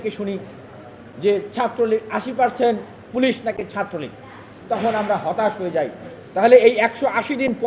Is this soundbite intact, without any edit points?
yes; 0 cuts

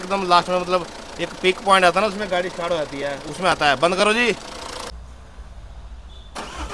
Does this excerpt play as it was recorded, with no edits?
no; 1 cut; at 4.9 s

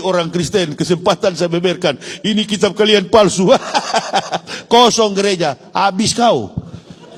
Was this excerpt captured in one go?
yes; 0 cuts

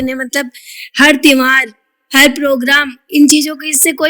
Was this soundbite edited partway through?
no; 0 cuts

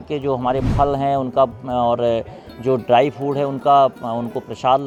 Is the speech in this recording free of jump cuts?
yes; 0 cuts

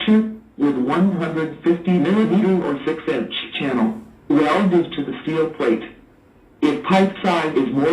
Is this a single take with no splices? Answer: no; 1 cut; at 5.9 s

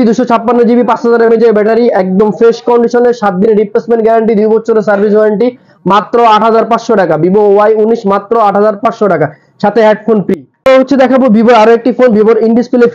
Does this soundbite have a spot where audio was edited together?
no; 0 cuts

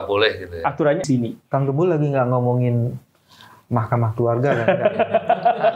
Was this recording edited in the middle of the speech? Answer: yes; 1 cut; at 1.0 s

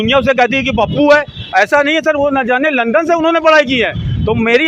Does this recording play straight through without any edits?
yes; 0 cuts

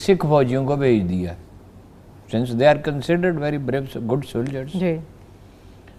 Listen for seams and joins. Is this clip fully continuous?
yes; 0 cuts

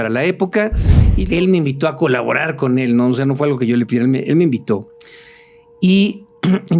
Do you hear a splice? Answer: yes; 1 cut; at 1.1 s

